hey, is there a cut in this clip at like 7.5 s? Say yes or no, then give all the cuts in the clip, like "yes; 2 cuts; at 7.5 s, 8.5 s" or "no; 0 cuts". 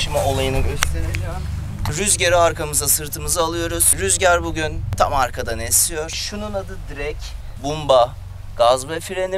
yes; 4 cuts; at 1.9 s, 4.8 s, 6.2 s, 7.5 s